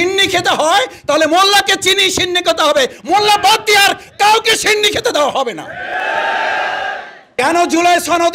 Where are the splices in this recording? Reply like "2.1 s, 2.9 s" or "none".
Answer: 7.3 s

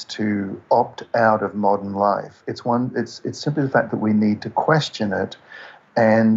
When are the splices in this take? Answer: none

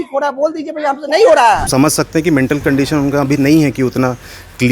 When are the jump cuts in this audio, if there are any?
1.7 s

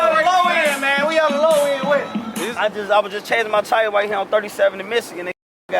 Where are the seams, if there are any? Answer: 2.3 s

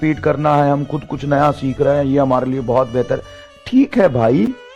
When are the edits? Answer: none

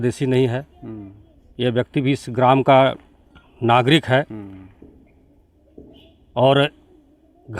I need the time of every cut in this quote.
none

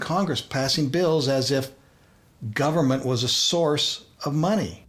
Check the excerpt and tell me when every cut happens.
none

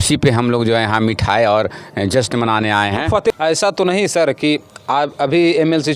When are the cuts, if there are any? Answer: 3.3 s

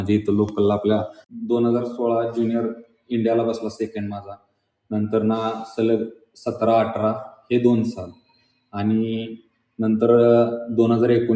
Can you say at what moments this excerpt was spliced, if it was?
1.2 s

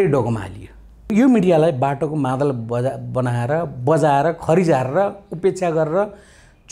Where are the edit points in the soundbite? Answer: 1.1 s

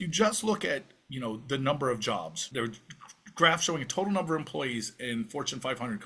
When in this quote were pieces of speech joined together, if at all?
2.5 s

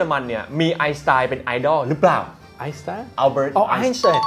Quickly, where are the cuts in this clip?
none

